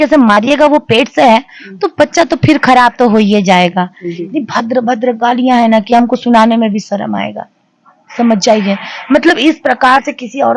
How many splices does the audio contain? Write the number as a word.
one